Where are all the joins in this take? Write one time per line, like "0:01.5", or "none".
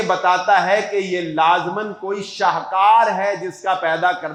none

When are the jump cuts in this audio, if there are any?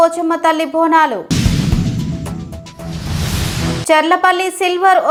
none

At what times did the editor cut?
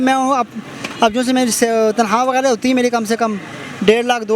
none

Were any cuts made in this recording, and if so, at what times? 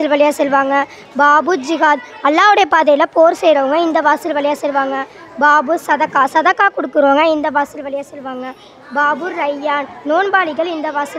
none

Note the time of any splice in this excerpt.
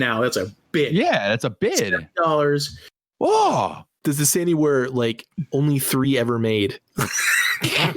0:03.9

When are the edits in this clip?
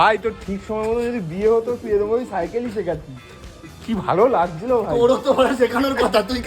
none

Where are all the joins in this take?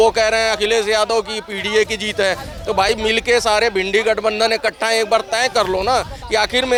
none

